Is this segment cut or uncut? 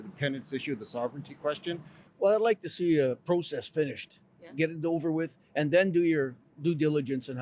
cut